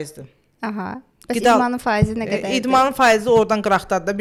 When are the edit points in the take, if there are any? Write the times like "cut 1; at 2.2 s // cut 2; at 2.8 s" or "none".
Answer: none